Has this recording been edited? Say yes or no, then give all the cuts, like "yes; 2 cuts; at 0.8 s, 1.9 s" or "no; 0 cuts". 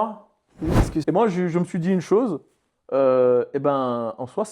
yes; 1 cut; at 1.0 s